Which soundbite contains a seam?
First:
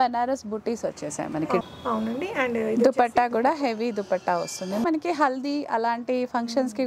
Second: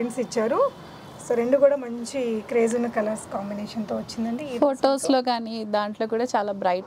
first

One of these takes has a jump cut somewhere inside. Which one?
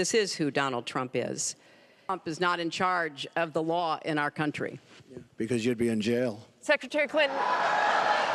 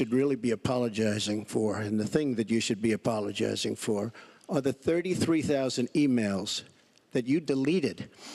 first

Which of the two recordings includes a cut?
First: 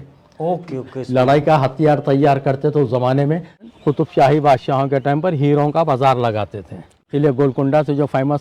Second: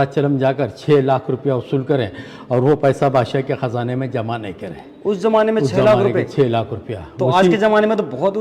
first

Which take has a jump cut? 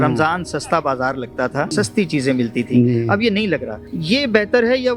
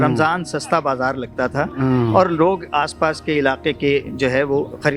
first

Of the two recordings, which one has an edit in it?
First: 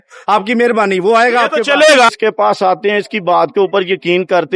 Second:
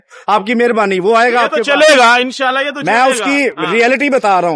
first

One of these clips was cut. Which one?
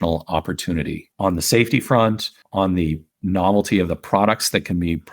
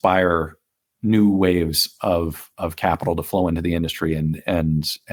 first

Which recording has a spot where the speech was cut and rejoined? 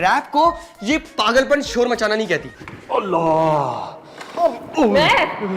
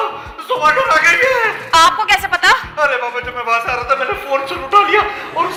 first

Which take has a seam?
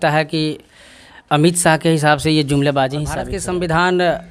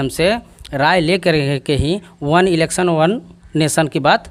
first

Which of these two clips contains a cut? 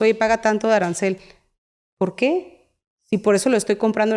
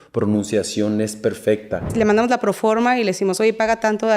second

